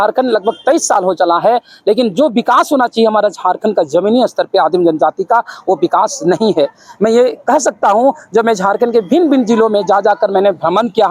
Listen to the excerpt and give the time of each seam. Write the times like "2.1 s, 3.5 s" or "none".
none